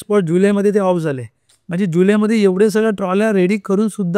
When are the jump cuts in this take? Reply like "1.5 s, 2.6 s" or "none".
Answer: none